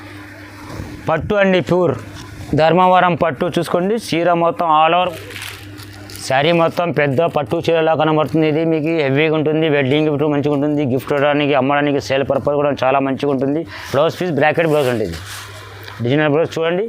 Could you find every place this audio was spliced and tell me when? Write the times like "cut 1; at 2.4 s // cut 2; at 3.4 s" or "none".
cut 1; at 5.1 s // cut 2; at 13.8 s